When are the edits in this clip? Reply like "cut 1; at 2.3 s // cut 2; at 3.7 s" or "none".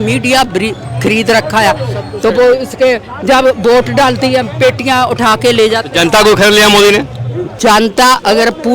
cut 1; at 7.4 s